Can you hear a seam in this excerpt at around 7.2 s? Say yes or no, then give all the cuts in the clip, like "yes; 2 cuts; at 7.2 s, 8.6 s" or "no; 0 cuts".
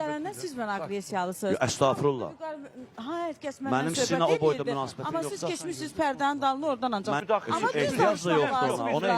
yes; 1 cut; at 7.2 s